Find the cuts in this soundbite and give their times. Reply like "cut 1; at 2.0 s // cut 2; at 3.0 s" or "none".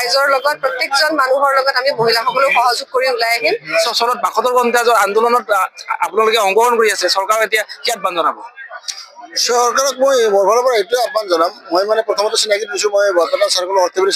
none